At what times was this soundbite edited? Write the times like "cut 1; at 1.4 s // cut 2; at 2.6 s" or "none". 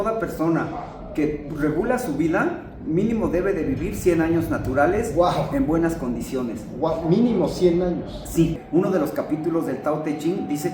cut 1; at 8.6 s